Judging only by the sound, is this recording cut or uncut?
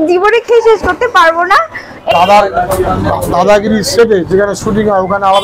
cut